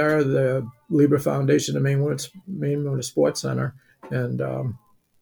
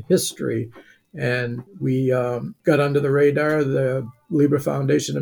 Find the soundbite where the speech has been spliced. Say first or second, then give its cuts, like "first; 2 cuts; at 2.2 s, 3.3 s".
second; 2 cuts; at 1.7 s, 2.5 s